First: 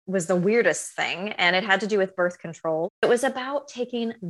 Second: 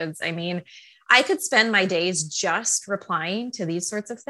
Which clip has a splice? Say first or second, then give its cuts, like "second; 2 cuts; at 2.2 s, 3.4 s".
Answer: first; 1 cut; at 3.0 s